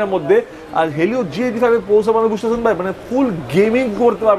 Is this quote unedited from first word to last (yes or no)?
yes